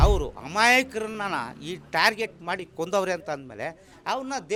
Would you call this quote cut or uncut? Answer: uncut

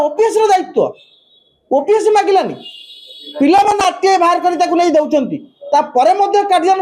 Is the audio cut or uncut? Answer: uncut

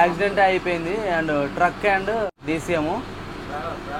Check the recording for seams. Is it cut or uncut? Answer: cut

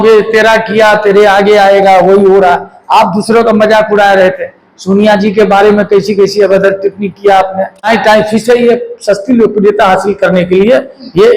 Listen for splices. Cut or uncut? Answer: cut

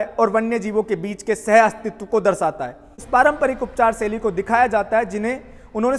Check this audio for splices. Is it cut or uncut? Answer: cut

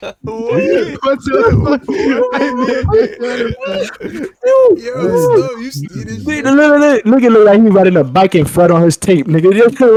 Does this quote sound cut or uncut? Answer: uncut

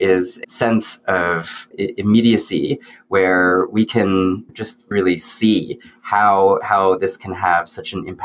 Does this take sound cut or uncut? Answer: cut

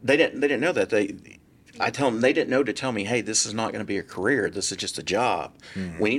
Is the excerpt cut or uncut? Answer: uncut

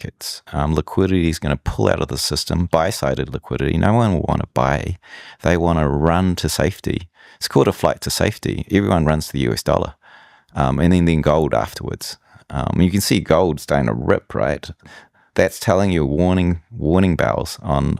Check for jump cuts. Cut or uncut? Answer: uncut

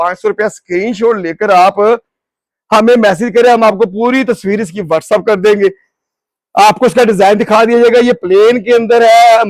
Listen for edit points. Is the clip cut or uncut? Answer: uncut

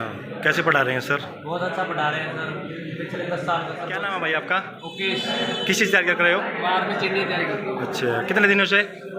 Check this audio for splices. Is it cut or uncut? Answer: cut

